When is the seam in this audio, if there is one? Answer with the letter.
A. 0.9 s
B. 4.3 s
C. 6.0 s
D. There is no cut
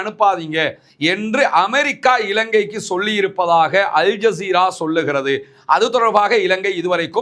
D